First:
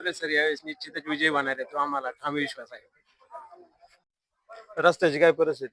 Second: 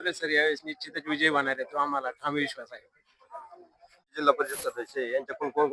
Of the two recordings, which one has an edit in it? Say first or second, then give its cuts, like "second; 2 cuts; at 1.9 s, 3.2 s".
first; 1 cut; at 4.0 s